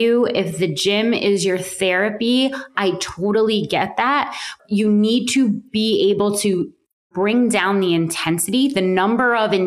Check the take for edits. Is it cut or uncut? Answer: cut